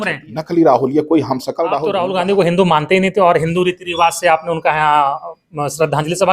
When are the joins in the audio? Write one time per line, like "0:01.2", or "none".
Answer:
0:01.8